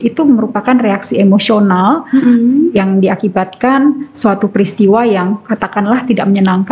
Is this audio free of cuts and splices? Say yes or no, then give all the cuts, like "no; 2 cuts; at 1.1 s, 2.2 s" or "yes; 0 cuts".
yes; 0 cuts